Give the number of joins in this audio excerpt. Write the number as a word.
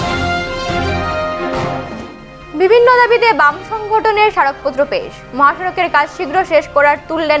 one